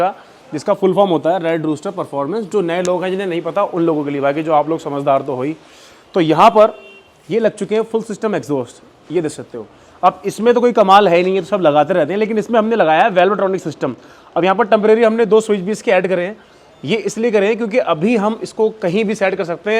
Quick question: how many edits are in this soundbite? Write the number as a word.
zero